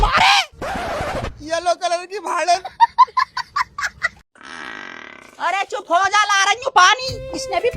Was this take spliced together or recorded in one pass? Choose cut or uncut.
cut